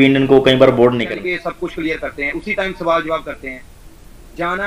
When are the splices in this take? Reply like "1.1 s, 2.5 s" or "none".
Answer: 1.1 s